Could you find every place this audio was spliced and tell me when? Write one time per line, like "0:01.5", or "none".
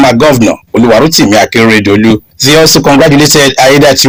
none